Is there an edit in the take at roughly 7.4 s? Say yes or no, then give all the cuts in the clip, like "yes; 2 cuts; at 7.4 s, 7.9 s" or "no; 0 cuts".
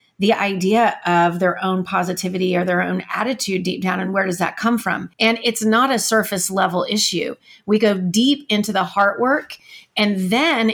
no; 1 cut; at 5.1 s